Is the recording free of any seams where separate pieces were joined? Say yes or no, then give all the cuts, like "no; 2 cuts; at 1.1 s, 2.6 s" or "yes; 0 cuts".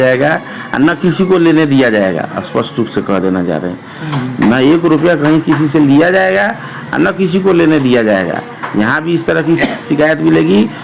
yes; 0 cuts